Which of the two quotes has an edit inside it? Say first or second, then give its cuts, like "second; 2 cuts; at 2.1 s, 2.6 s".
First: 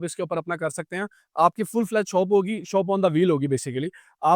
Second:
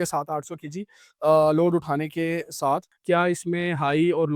second; 1 cut; at 2.9 s